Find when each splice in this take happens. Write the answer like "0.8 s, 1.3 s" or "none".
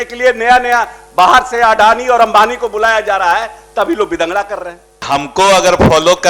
5.1 s